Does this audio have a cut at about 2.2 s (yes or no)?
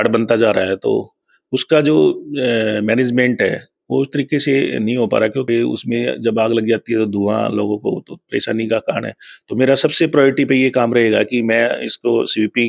no